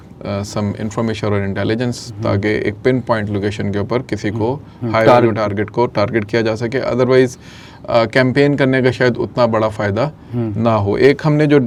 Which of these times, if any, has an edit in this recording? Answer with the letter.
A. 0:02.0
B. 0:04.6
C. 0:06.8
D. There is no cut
D